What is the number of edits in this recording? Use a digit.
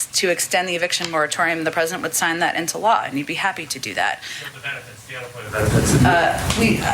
1